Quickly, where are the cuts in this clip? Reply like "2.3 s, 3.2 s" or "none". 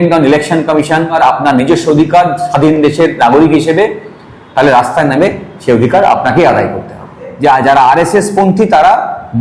1.2 s, 7.2 s